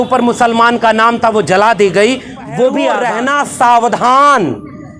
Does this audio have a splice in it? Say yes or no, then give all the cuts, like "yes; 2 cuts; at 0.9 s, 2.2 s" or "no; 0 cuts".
yes; 1 cut; at 3.0 s